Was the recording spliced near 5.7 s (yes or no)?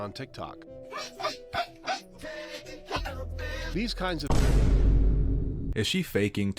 yes